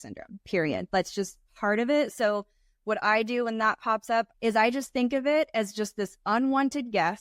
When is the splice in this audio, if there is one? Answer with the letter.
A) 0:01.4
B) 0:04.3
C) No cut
B